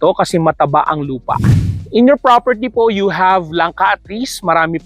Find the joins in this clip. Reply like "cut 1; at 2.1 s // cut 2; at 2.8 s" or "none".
cut 1; at 1.7 s

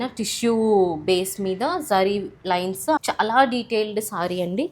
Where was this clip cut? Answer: cut 1; at 3.0 s

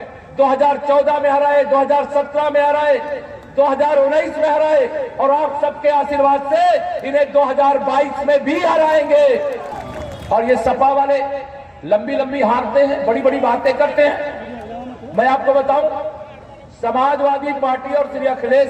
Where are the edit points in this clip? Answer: cut 1; at 9.7 s

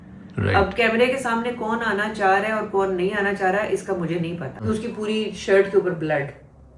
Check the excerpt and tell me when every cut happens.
cut 1; at 4.6 s

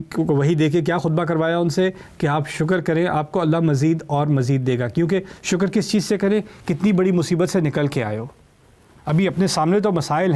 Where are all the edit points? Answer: none

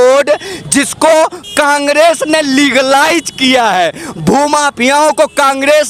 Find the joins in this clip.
none

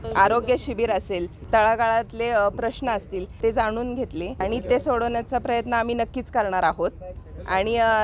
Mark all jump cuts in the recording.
none

